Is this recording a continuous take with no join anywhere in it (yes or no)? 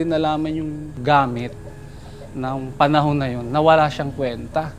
no